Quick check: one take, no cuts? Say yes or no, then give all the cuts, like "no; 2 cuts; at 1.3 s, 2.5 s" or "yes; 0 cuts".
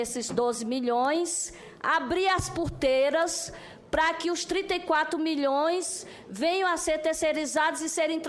yes; 0 cuts